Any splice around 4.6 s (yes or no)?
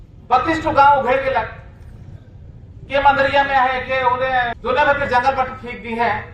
yes